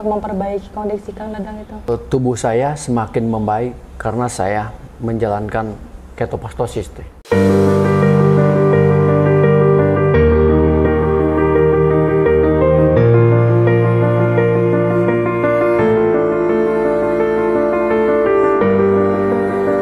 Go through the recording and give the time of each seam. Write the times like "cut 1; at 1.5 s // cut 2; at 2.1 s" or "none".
cut 1; at 1.9 s // cut 2; at 7.2 s